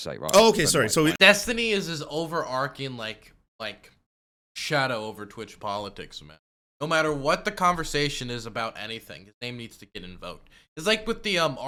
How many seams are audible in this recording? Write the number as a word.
zero